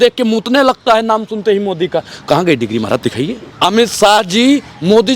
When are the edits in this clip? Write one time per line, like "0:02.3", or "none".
0:03.4